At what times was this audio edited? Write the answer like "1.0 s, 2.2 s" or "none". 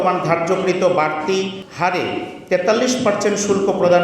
1.6 s